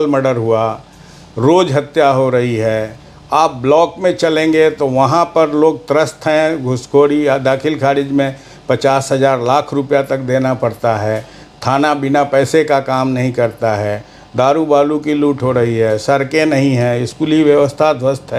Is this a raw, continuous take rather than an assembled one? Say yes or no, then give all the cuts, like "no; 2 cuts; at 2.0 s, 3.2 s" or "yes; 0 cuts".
yes; 0 cuts